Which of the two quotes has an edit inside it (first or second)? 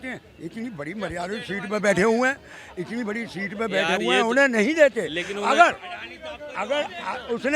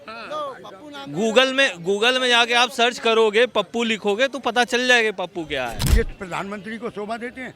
second